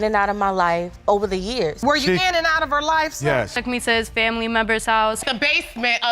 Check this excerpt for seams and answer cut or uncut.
cut